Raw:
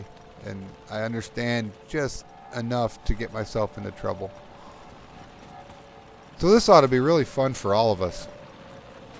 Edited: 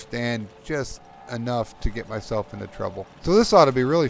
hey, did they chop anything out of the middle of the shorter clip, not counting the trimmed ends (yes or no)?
yes